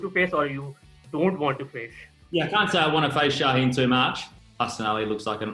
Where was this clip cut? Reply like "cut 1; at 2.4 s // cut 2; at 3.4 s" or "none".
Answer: cut 1; at 2.1 s // cut 2; at 4.3 s